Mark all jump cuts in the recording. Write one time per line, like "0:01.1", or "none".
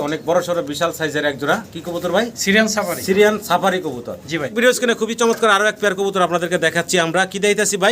0:04.4